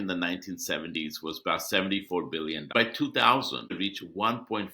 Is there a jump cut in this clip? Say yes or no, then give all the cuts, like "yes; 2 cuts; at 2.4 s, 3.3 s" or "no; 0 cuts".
yes; 2 cuts; at 2.7 s, 3.7 s